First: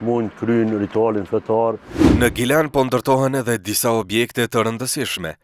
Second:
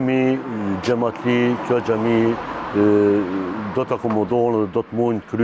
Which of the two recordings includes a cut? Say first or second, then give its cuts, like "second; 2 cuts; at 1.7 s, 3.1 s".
first; 1 cut; at 2.1 s